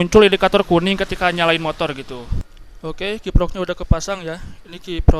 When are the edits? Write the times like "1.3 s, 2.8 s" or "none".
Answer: 2.4 s